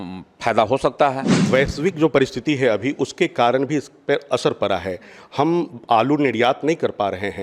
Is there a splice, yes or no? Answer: yes